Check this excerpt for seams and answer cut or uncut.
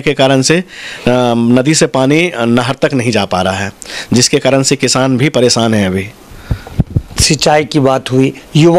uncut